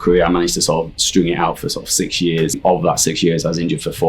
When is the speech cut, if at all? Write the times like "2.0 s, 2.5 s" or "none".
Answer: 2.6 s